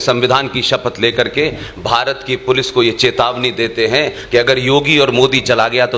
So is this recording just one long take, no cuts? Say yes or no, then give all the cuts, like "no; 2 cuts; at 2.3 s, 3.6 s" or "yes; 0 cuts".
yes; 0 cuts